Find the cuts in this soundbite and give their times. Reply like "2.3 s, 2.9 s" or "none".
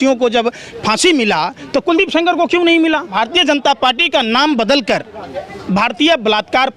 3.1 s